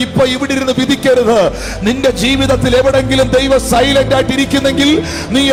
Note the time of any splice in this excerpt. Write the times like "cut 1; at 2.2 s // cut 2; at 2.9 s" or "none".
none